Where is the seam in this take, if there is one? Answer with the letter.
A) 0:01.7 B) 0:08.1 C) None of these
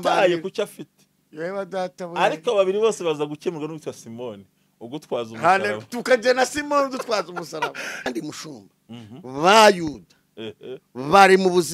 B